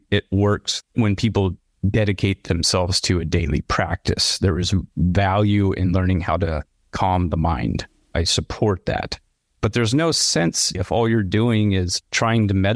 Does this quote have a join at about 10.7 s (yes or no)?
yes